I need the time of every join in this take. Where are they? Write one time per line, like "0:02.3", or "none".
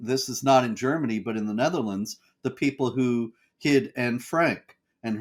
none